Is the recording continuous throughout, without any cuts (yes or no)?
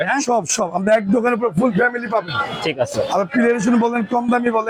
yes